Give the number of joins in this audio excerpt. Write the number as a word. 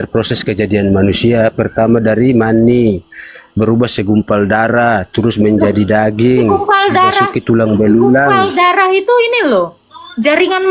zero